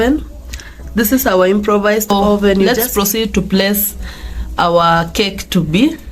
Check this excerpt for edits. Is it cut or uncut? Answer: cut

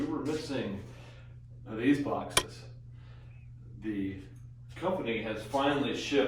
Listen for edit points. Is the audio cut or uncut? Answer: cut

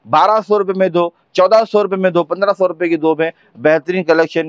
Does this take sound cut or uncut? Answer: uncut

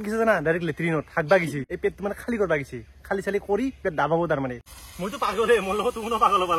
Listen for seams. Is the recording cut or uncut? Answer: cut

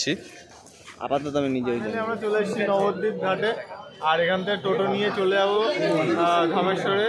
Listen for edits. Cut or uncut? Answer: cut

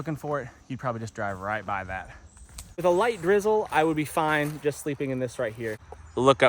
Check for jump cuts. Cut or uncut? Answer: cut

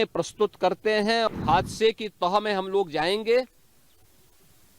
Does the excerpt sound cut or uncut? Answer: cut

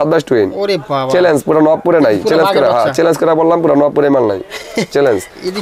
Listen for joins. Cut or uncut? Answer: uncut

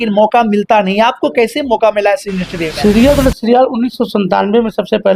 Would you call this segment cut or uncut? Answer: cut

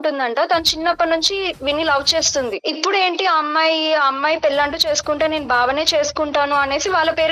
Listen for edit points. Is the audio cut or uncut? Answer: cut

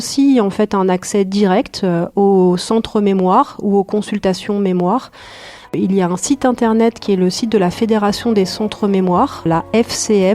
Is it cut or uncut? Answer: cut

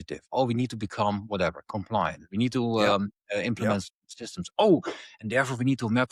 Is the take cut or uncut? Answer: uncut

